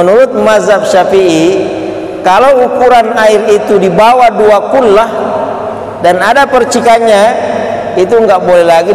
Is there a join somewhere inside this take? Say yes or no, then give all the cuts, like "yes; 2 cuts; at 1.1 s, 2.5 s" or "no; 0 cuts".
no; 0 cuts